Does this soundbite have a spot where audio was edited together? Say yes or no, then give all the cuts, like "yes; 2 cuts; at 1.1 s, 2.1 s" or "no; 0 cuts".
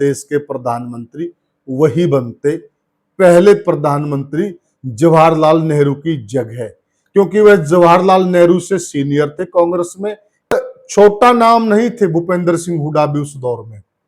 yes; 1 cut; at 10.5 s